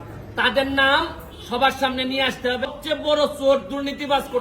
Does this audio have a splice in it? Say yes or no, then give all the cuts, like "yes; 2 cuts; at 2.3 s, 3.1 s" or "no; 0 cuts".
yes; 1 cut; at 2.7 s